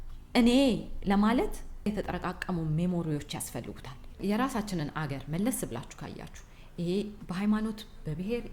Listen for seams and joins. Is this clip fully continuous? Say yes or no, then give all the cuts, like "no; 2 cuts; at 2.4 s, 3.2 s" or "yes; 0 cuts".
no; 1 cut; at 4.2 s